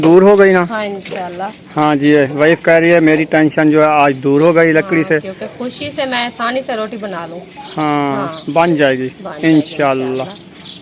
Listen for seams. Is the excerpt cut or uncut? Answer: uncut